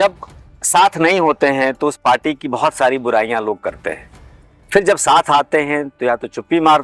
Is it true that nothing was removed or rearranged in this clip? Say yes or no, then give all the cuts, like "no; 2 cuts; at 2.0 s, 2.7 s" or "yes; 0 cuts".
yes; 0 cuts